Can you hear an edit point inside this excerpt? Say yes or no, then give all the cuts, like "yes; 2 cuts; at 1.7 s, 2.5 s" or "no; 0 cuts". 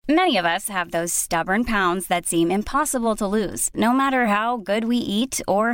no; 0 cuts